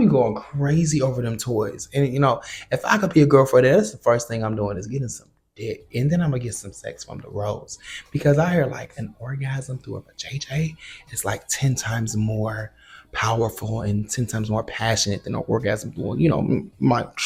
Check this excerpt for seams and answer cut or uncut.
uncut